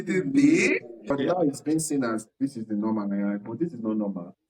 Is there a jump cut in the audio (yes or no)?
yes